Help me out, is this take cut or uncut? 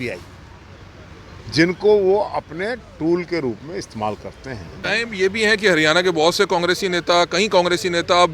cut